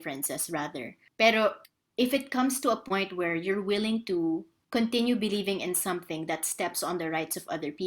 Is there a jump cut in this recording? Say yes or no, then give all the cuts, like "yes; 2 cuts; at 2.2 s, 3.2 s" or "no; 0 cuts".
yes; 3 cuts; at 1.0 s, 1.7 s, 4.5 s